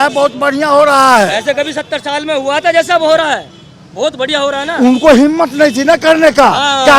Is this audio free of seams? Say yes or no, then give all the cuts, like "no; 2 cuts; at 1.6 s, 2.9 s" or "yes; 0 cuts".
yes; 0 cuts